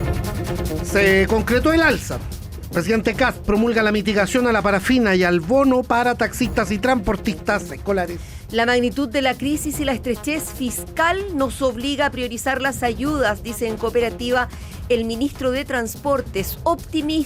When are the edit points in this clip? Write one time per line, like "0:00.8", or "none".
0:00.9